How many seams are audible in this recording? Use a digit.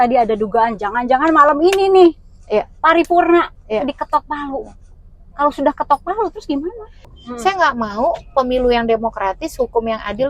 1